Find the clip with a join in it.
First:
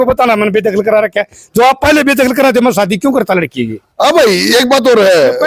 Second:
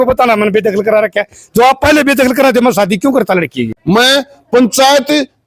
second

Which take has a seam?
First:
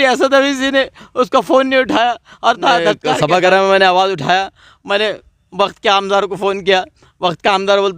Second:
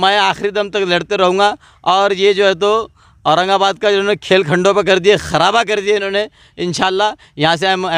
first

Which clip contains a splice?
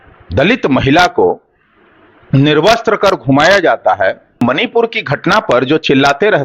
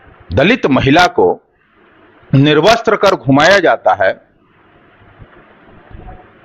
first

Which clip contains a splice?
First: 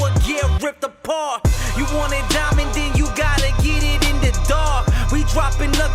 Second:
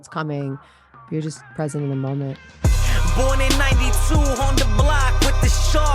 second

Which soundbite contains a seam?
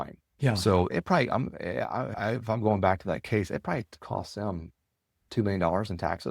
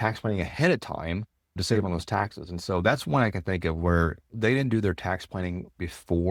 first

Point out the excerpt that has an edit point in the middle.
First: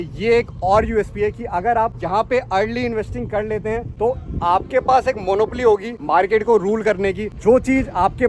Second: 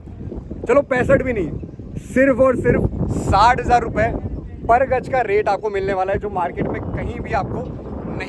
first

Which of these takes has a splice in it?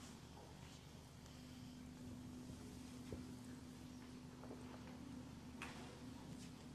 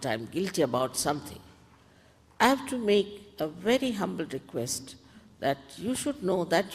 second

